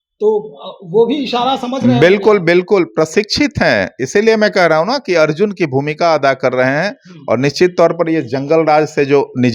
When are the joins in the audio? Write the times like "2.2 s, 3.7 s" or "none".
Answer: none